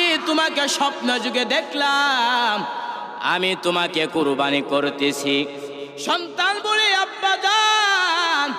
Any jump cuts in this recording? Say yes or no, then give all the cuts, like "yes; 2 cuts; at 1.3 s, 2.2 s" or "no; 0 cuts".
yes; 1 cut; at 5.8 s